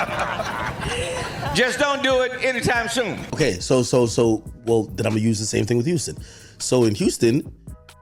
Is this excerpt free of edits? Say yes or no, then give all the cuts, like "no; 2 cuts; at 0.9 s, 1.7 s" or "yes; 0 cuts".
no; 1 cut; at 3.2 s